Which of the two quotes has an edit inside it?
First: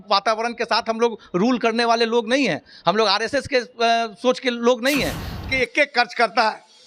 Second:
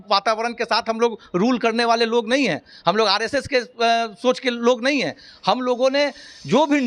first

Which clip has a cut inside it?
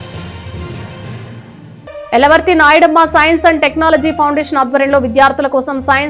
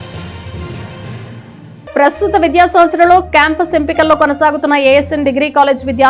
second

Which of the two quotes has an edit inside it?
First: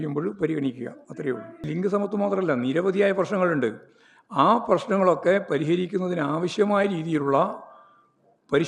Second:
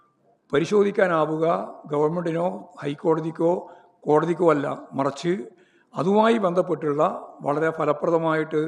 first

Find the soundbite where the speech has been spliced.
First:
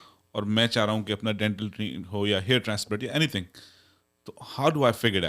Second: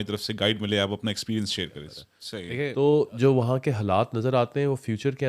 second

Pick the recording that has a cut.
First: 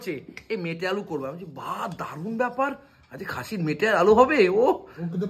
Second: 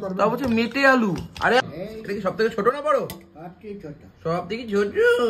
second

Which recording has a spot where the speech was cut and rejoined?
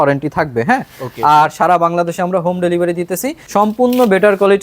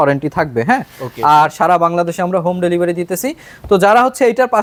first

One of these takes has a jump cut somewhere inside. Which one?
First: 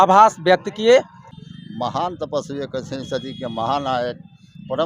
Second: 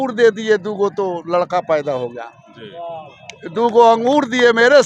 first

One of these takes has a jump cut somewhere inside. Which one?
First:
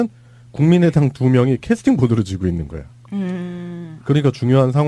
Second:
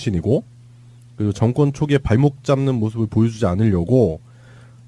first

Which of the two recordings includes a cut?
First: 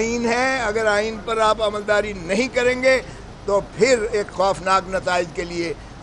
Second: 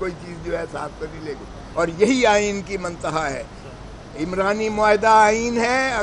second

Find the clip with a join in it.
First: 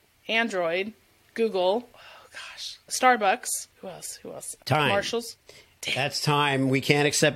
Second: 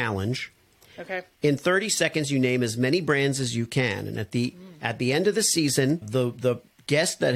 second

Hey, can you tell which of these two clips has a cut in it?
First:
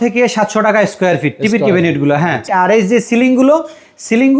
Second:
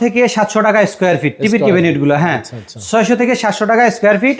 first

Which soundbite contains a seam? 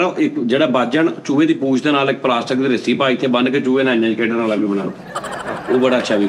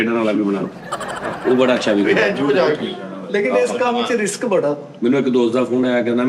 second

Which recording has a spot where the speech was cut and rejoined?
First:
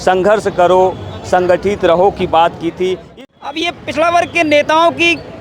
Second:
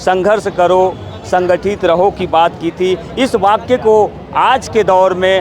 first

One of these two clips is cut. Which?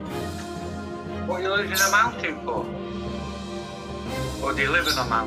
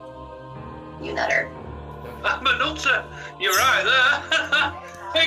first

